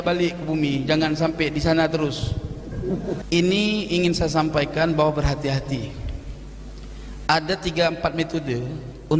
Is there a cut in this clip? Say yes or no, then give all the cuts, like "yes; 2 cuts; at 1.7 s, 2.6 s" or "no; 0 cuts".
yes; 1 cut; at 3.2 s